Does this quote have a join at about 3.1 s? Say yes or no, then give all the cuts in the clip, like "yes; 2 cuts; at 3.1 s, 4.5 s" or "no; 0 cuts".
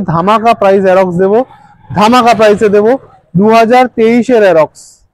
no; 0 cuts